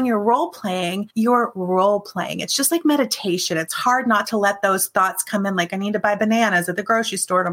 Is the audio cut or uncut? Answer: cut